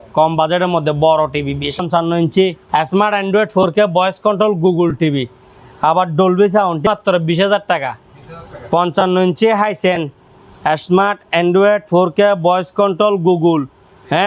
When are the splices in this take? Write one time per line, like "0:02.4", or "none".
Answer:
0:01.8
0:02.6
0:06.9

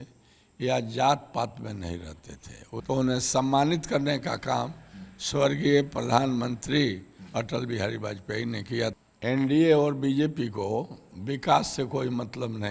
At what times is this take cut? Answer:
0:02.8
0:09.0

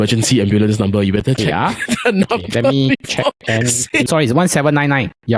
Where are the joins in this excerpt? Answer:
0:04.1

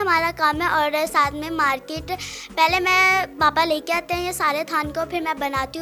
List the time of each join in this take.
none

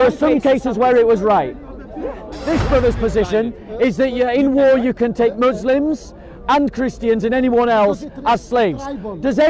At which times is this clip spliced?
0:02.3

